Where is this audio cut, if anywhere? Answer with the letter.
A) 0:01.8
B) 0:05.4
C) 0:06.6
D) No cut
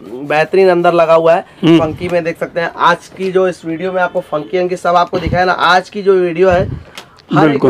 A